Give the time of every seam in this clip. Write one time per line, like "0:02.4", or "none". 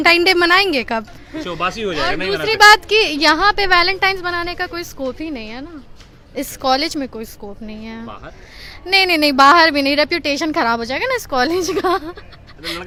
none